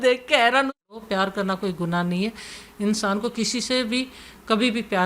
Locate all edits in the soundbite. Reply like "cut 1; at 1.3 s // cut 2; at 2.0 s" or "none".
cut 1; at 1.0 s